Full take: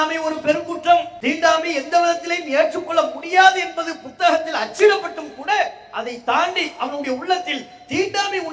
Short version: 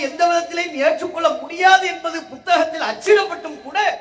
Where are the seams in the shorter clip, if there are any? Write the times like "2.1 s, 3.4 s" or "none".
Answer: none